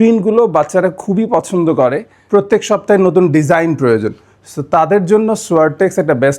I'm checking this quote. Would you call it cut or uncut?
cut